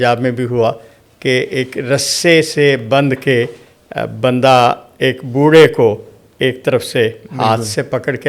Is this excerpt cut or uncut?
uncut